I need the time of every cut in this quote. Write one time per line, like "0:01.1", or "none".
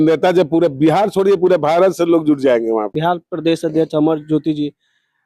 0:02.9

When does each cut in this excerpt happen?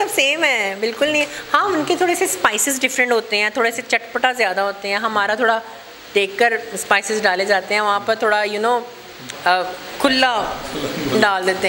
none

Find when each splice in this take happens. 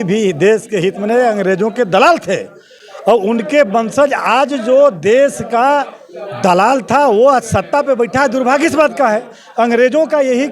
none

